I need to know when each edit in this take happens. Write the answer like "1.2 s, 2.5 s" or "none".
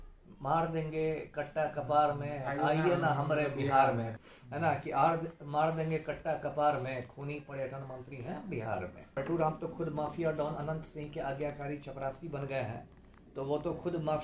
4.1 s, 9.1 s